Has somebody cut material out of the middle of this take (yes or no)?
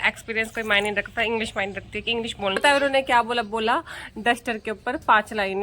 yes